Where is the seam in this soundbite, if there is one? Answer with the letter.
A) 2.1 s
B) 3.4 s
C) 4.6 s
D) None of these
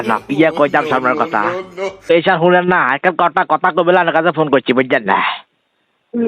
A